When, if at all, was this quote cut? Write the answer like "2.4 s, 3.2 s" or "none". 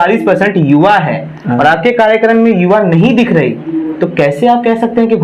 none

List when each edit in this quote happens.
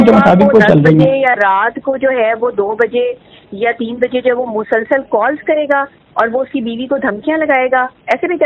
none

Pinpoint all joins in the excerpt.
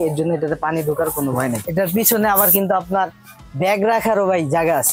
1.6 s

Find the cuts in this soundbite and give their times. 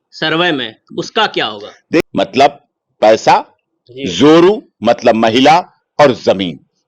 2.0 s

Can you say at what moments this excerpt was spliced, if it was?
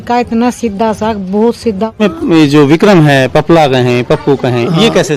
2.0 s

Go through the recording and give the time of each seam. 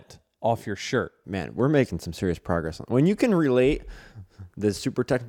1.2 s

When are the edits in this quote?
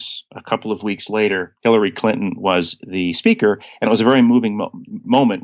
none

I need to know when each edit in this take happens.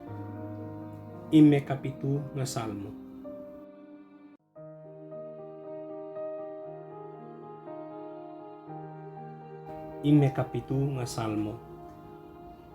none

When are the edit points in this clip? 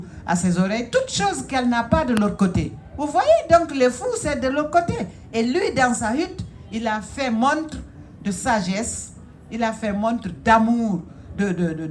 none

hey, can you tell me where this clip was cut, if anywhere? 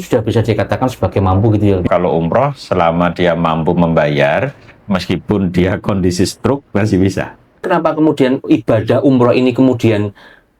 1.9 s, 7.6 s

